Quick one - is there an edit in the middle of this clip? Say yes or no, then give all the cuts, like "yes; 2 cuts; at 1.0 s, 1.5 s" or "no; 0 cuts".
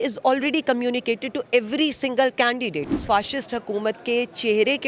yes; 1 cut; at 3.0 s